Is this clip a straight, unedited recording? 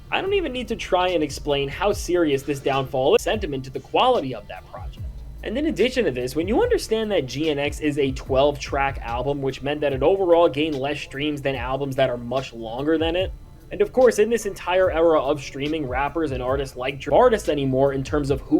no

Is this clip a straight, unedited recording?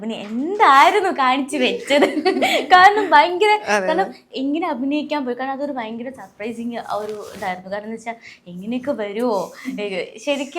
yes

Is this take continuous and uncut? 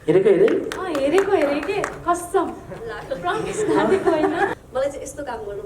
no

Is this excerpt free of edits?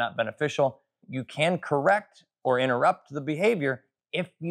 no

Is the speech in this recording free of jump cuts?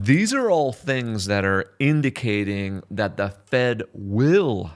yes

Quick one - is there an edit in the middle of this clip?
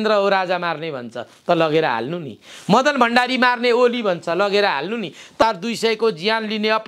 yes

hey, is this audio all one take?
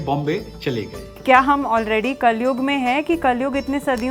no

